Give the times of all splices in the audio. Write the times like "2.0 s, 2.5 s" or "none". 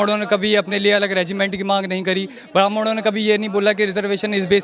none